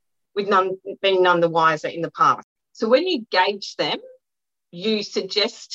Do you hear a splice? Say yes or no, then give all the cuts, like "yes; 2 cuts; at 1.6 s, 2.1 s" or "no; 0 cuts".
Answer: yes; 1 cut; at 2.4 s